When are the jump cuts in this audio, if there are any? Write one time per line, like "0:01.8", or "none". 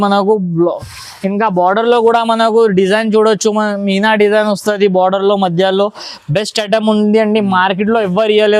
none

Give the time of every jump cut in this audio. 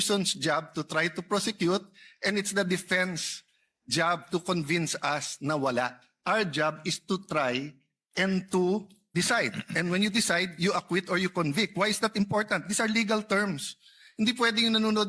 0:09.1

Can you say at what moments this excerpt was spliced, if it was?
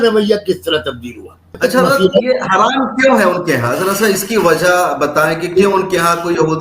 0:01.6

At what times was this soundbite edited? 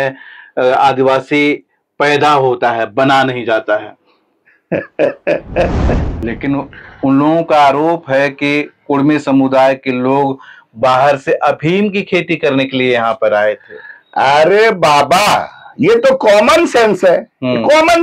0:06.1

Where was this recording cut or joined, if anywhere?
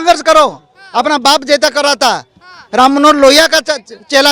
none

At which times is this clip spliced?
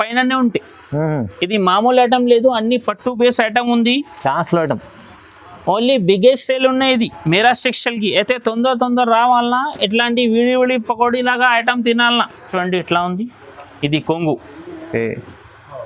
0:12.5

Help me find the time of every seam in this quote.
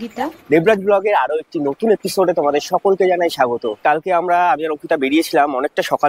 0:03.8

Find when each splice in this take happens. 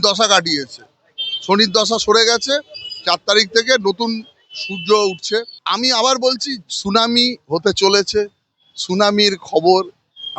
0:05.6

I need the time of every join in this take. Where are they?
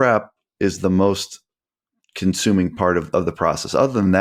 none

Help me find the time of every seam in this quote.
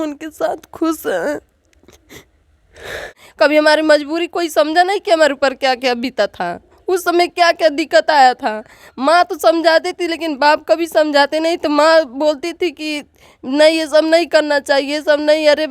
0:03.2

